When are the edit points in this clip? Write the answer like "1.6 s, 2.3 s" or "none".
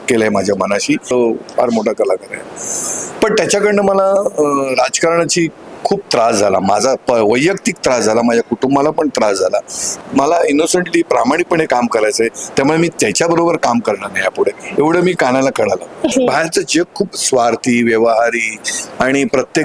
1.1 s, 10.0 s, 16.1 s

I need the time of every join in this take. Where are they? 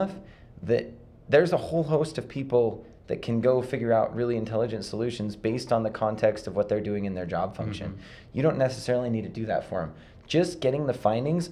none

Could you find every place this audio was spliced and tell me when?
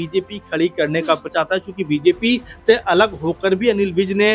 1.3 s

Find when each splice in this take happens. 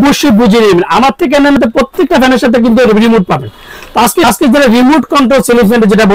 1.6 s, 4.2 s

